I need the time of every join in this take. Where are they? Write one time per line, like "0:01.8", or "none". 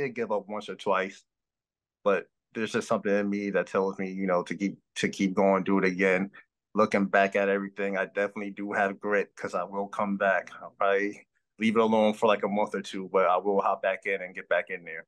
none